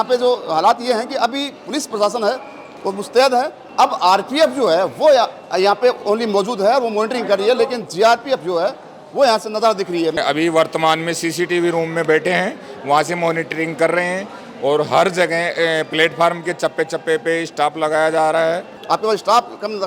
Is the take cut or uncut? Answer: cut